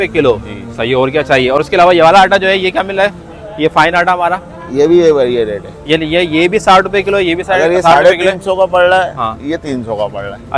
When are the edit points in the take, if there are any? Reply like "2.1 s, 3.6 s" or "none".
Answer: none